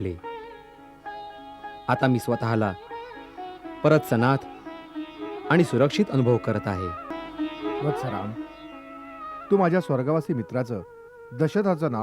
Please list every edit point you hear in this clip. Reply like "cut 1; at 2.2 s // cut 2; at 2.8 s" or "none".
cut 1; at 7.0 s

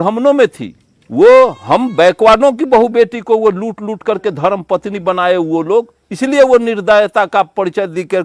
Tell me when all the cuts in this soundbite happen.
cut 1; at 1.0 s

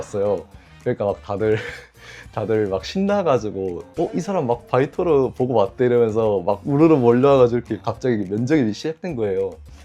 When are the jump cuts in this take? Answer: none

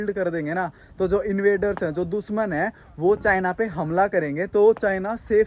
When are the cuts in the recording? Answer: none

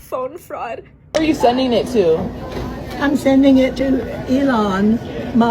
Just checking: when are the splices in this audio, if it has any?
cut 1; at 0.9 s

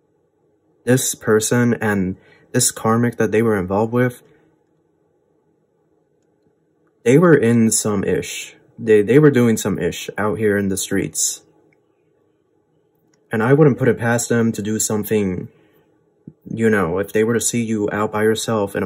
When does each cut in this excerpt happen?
none

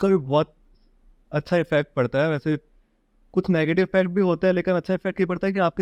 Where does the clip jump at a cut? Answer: none

